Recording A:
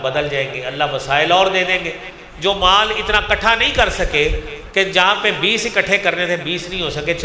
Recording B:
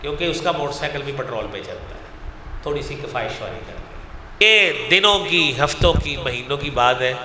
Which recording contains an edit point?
B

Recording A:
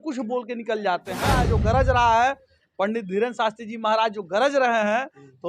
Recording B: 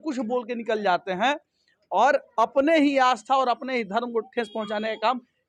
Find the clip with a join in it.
A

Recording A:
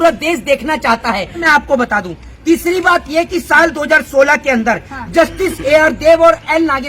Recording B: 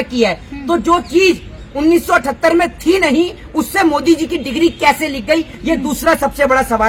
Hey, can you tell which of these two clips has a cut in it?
A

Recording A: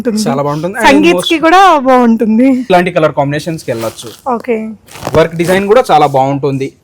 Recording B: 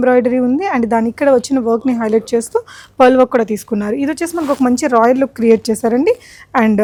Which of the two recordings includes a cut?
A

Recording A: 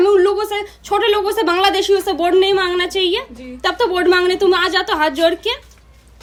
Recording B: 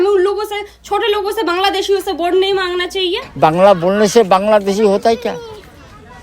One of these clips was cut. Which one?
B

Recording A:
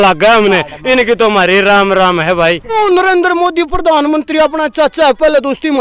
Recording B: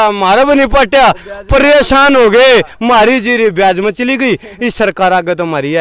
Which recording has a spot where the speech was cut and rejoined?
A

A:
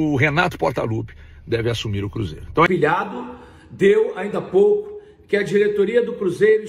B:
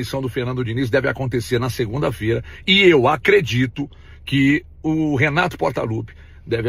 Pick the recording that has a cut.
A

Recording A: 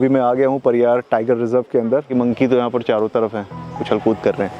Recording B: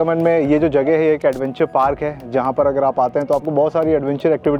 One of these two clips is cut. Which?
A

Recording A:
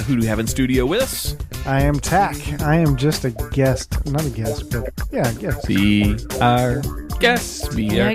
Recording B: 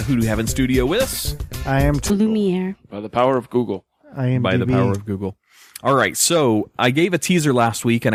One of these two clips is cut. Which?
A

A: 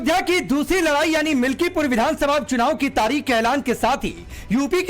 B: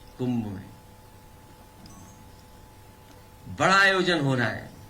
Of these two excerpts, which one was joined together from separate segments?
A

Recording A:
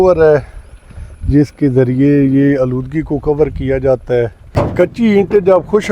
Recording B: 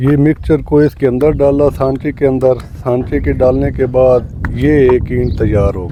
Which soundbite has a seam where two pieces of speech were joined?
A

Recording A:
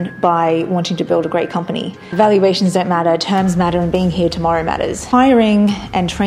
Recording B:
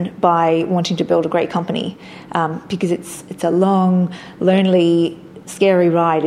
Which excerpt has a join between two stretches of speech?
A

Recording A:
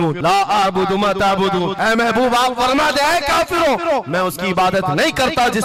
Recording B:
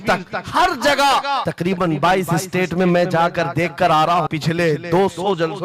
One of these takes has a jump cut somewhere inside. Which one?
B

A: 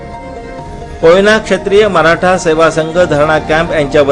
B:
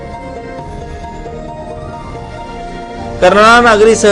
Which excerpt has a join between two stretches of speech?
A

